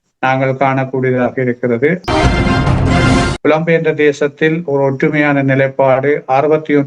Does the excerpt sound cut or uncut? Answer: cut